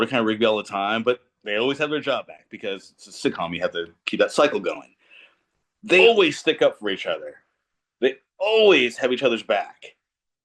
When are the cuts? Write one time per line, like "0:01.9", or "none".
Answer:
0:06.0